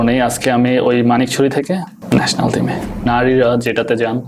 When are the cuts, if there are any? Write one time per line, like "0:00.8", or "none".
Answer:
0:02.0
0:03.1

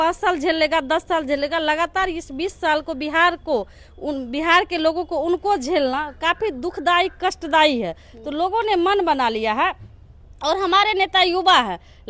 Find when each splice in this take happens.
none

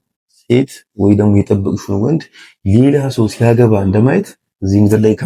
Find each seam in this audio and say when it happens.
none

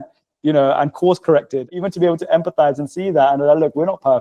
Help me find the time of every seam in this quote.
0:01.7

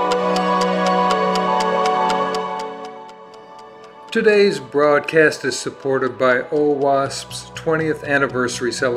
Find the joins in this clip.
0:04.1

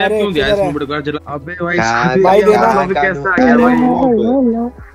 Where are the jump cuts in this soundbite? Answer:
0:01.2

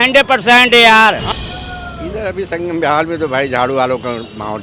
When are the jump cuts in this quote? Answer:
0:01.2

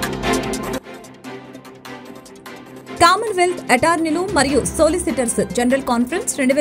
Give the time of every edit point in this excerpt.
0:00.9

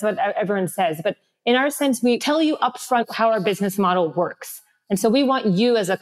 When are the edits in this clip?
none

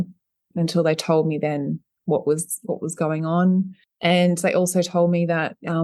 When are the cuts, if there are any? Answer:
0:03.8

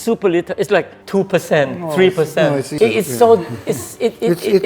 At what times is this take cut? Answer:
0:01.0
0:02.8

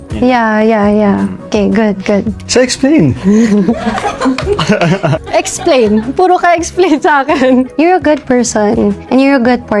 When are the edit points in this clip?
0:02.4

